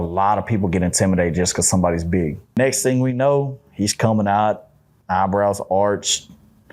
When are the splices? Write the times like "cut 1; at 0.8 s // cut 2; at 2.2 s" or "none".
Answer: cut 1; at 2.6 s